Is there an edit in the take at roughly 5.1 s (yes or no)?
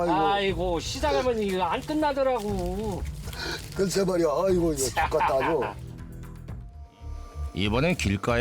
no